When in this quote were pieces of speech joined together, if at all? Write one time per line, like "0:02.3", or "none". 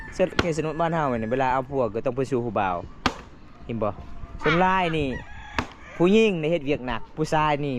none